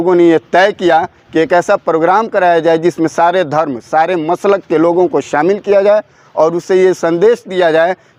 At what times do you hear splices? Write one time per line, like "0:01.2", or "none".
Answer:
none